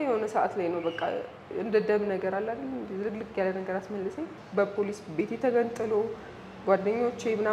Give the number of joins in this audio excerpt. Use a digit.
1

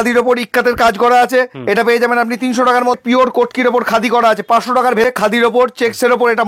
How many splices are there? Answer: 2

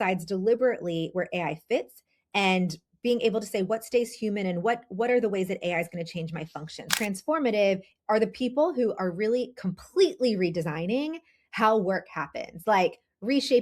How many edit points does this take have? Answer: 1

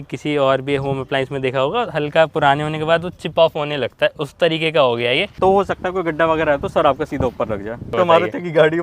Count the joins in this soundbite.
2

